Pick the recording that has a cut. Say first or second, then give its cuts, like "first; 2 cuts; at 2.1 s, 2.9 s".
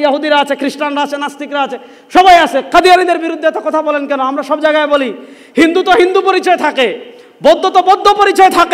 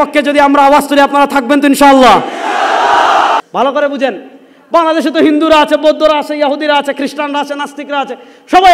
second; 1 cut; at 3.4 s